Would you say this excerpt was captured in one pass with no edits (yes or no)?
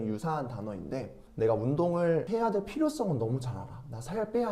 no